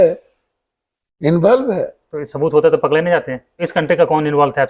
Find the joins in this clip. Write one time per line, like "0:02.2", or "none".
0:03.6